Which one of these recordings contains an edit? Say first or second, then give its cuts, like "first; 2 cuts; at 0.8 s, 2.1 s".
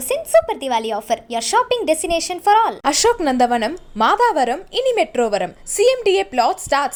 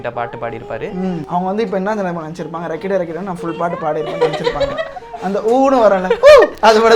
second; 1 cut; at 1.2 s